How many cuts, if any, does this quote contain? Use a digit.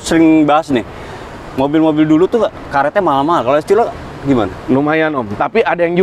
0